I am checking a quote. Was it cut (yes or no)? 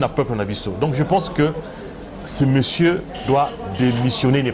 no